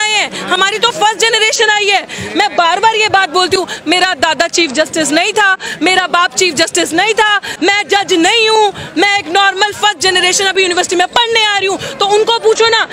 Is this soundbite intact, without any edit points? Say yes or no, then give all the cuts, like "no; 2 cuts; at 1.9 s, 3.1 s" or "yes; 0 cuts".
yes; 0 cuts